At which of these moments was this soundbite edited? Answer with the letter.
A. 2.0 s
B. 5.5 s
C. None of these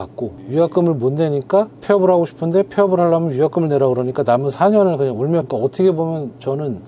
B